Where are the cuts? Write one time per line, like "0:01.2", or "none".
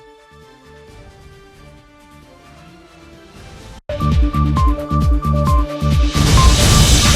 0:03.8